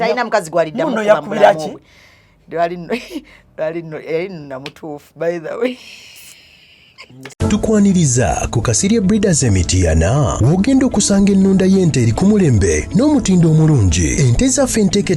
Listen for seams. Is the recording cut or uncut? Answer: cut